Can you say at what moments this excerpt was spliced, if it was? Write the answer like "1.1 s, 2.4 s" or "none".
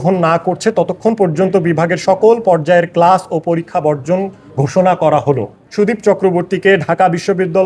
5.6 s